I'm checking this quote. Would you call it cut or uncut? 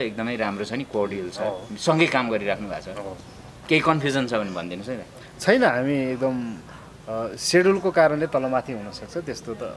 uncut